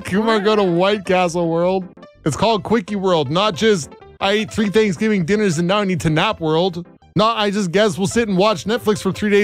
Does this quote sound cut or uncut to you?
cut